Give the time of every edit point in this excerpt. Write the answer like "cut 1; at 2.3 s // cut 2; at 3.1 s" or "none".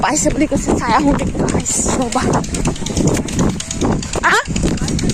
none